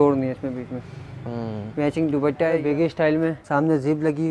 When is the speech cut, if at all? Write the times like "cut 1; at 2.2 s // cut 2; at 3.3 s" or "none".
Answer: cut 1; at 2.6 s // cut 2; at 3.4 s